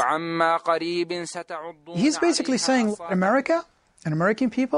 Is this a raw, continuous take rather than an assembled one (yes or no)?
no